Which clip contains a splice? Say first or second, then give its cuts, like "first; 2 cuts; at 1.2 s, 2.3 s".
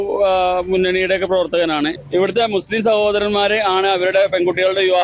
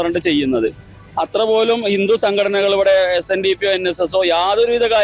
first; 1 cut; at 2.0 s